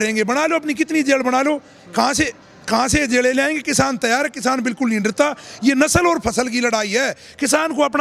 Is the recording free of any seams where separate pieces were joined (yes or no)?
yes